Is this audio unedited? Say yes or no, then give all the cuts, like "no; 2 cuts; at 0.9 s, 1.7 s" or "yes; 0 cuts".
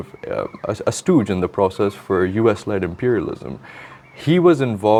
yes; 0 cuts